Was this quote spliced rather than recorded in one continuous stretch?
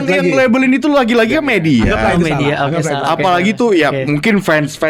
no; 0 cuts

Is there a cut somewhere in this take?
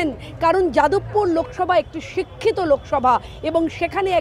no; 0 cuts

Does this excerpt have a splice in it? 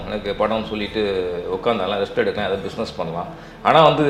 no; 0 cuts

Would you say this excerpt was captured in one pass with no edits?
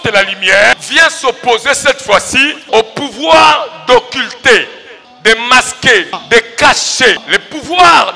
no; 5 cuts; at 0.8 s, 2.7 s, 5.0 s, 6.2 s, 7.2 s

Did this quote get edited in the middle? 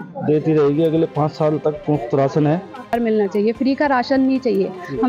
yes; 1 cut; at 2.9 s

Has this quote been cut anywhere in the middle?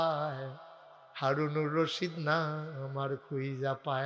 no; 0 cuts

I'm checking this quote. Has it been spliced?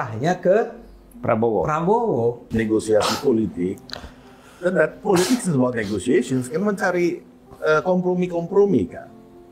yes; 1 cut; at 2.4 s

